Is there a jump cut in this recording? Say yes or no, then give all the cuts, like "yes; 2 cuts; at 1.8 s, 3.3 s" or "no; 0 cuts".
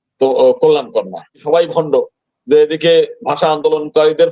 yes; 1 cut; at 1.4 s